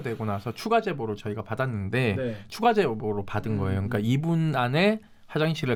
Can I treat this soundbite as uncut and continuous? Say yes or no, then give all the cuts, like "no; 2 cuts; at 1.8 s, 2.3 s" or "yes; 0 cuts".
yes; 0 cuts